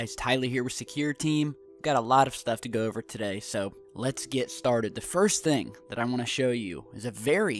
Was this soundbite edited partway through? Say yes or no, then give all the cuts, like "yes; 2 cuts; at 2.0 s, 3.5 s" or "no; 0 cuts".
no; 0 cuts